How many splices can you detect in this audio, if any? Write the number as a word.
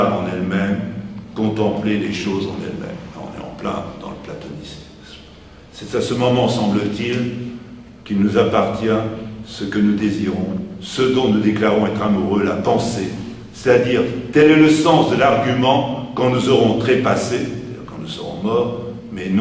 one